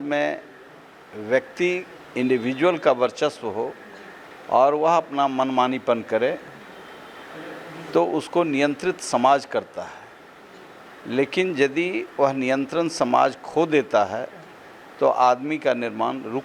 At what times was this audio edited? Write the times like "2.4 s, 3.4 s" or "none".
none